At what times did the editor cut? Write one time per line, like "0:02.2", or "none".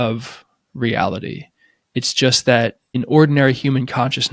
0:03.0